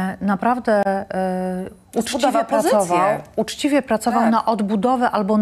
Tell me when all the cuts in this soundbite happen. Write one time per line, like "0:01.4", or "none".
none

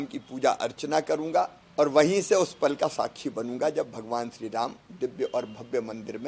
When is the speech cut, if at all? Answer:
0:01.6

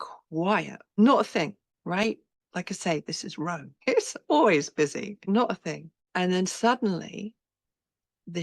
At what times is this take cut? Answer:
0:01.0
0:01.7
0:02.3
0:03.7
0:05.2
0:05.9

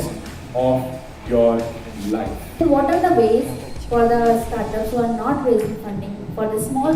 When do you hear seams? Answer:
0:02.4

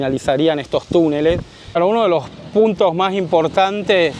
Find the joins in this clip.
0:01.7

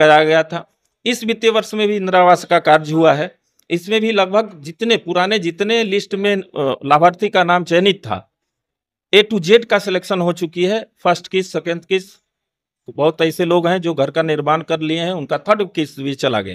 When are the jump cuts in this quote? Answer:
none

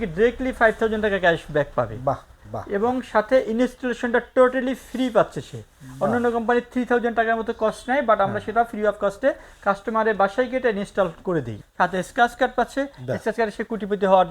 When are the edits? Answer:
0:11.5

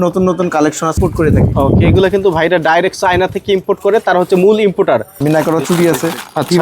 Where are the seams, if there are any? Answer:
0:01.0
0:05.1

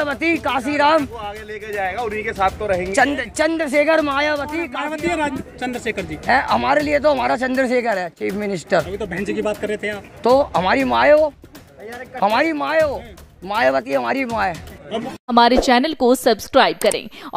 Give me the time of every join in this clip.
0:04.7
0:15.0

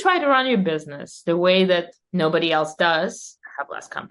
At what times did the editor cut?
0:02.0
0:03.3

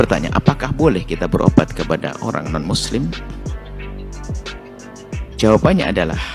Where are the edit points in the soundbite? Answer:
0:03.4
0:05.0

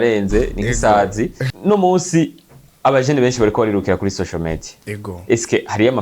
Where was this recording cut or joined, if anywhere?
0:01.5

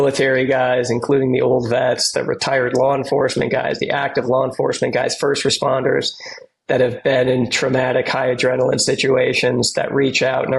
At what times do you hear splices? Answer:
none

